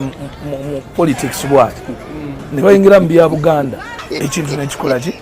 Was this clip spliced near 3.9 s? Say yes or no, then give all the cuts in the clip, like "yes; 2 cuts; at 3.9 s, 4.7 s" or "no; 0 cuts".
yes; 1 cut; at 3.9 s